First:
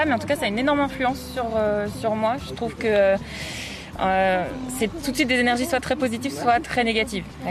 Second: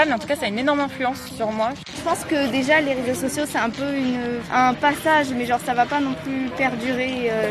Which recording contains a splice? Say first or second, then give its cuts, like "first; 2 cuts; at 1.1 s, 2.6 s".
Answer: second; 2 cuts; at 1.4 s, 4.4 s